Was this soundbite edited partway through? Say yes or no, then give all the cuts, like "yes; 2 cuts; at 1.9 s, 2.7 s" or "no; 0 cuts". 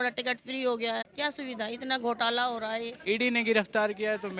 yes; 2 cuts; at 1.1 s, 3.0 s